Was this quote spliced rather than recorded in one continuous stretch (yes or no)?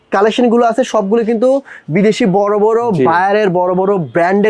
no